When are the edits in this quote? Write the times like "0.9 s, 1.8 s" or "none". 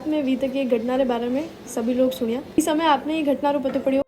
2.6 s